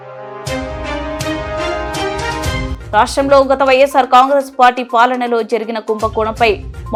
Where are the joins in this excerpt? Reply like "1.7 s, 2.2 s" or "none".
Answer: none